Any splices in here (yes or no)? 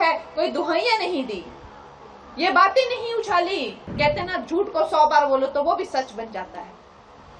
yes